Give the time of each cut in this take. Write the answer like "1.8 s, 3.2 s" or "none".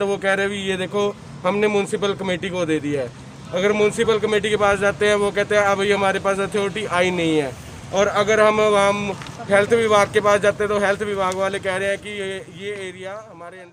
none

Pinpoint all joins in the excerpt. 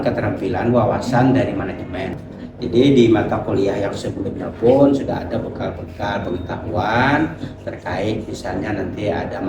2.1 s

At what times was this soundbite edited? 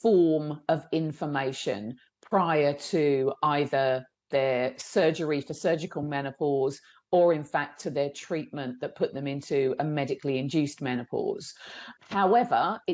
11.9 s

